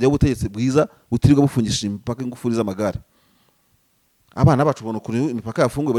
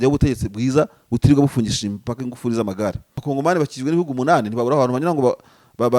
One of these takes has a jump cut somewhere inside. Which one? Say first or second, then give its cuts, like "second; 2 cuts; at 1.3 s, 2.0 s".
second; 1 cut; at 3.1 s